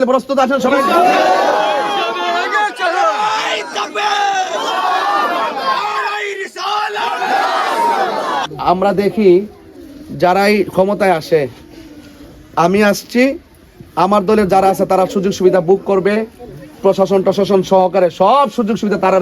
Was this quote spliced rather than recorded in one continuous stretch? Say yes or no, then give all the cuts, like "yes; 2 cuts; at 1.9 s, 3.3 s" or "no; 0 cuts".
yes; 1 cut; at 8.5 s